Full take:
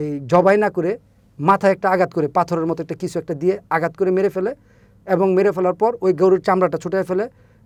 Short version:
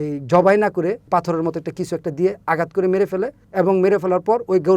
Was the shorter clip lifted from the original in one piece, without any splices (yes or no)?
no